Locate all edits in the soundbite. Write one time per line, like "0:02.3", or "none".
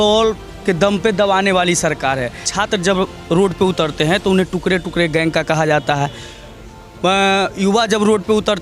0:02.5